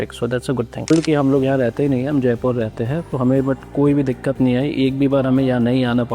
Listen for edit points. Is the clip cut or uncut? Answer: cut